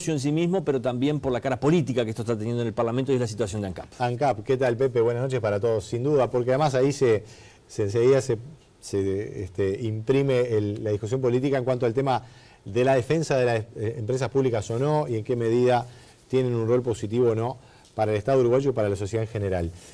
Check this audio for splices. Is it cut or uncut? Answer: cut